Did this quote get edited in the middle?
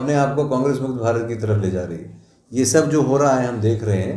no; 0 cuts

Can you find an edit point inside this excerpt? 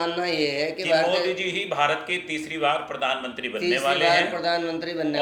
no; 0 cuts

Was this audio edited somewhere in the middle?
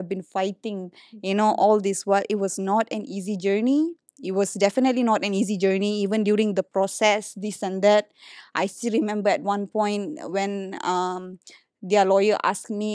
no; 0 cuts

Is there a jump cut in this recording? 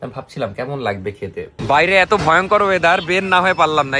yes; 1 cut; at 1.5 s

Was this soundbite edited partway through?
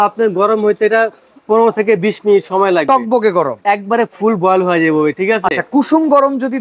no; 0 cuts

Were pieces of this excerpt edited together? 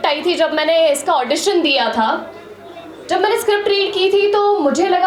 no; 0 cuts

